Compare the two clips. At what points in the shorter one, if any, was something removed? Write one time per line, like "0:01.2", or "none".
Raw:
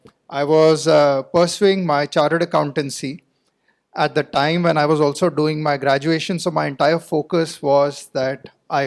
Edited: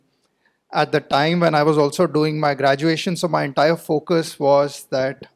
none